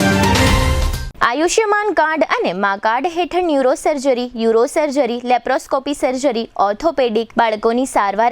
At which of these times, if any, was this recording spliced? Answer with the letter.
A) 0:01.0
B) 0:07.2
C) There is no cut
A